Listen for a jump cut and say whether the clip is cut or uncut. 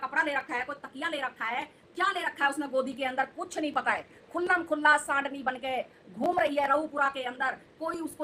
uncut